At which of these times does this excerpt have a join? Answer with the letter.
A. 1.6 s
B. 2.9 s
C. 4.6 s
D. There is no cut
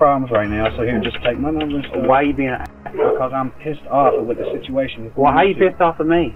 D